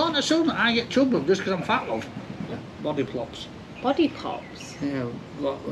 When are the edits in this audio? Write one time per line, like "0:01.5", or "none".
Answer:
0:02.5